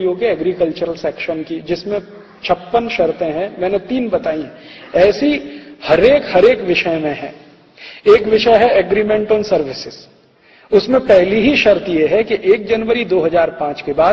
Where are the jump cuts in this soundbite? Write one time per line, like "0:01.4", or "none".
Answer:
0:10.7